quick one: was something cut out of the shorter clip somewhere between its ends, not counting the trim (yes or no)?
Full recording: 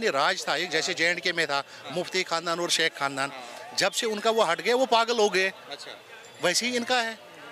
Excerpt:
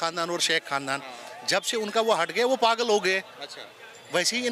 no